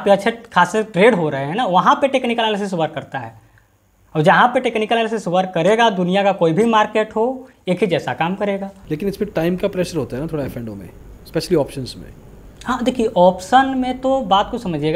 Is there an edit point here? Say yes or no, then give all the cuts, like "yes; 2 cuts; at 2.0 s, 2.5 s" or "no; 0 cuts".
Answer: no; 0 cuts